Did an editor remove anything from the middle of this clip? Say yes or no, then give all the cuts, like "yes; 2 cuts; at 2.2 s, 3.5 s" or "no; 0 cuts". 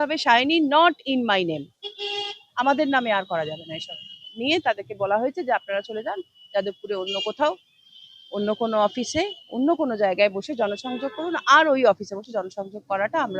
yes; 1 cut; at 4.3 s